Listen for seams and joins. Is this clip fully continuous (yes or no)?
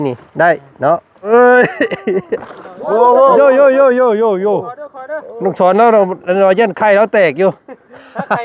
no